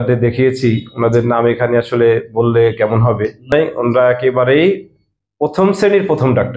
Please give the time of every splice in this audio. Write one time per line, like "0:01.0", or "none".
0:03.5

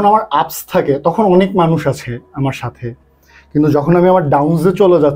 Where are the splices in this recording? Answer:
none

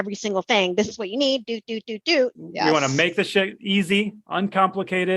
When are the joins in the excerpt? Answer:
0:02.4

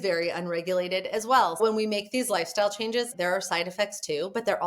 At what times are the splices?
0:01.6
0:03.1

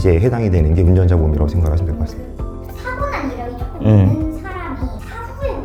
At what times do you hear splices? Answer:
none

